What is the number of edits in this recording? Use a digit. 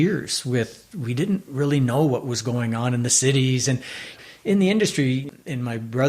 2